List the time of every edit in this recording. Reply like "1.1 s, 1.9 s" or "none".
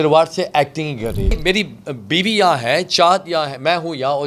1.4 s